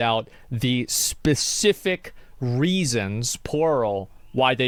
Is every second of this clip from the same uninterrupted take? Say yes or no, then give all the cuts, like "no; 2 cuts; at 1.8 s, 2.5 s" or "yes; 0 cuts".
yes; 0 cuts